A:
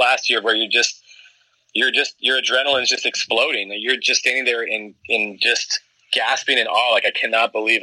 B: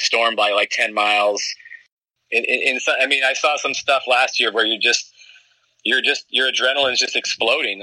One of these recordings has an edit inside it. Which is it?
B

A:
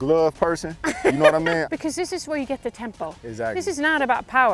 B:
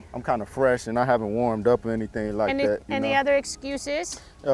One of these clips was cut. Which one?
A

